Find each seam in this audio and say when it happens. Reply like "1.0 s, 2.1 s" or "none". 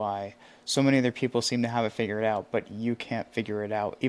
none